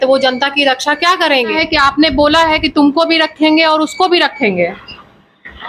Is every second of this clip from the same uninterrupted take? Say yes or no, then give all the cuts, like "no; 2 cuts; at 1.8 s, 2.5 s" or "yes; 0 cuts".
no; 1 cut; at 1.5 s